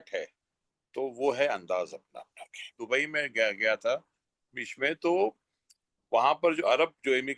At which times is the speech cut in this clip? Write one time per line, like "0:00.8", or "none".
0:02.7